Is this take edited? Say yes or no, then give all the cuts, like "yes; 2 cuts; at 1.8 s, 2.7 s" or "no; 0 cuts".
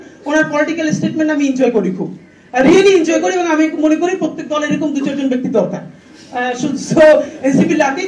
no; 0 cuts